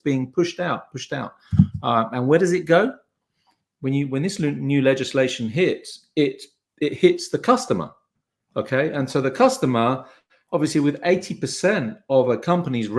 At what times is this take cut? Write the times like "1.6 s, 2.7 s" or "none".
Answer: none